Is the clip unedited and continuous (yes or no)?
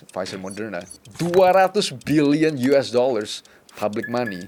yes